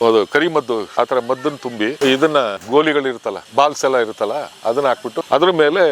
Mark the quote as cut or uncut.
cut